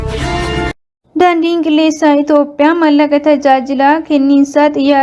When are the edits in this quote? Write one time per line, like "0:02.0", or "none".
0:00.9